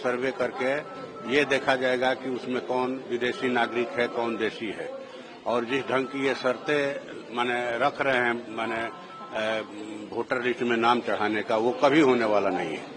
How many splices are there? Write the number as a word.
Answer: zero